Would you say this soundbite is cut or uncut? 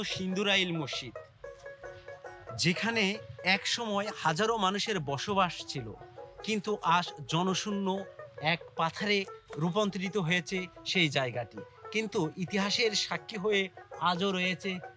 uncut